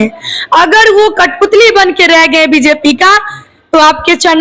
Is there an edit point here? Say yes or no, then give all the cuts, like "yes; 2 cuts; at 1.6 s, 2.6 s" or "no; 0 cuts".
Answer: no; 0 cuts